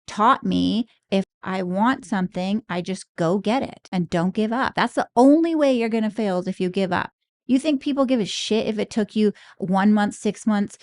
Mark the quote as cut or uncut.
cut